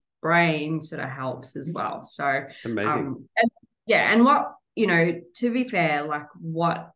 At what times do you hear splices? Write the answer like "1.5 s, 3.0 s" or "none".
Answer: none